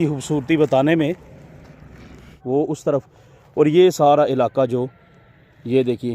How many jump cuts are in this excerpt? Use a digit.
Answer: 1